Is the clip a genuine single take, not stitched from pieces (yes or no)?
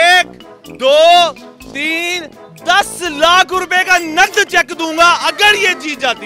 yes